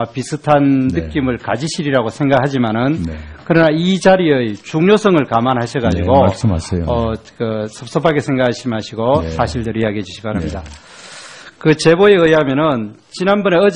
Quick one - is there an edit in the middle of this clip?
yes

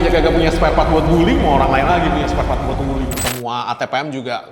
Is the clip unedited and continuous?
no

